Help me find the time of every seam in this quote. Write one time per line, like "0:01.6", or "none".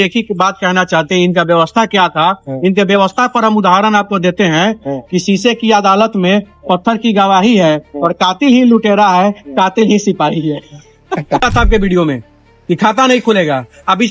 0:11.4